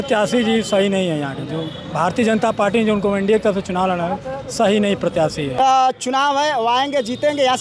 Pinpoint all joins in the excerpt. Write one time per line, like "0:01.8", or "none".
0:05.6